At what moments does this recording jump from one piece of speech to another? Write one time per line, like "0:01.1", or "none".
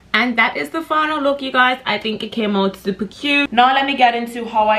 0:03.5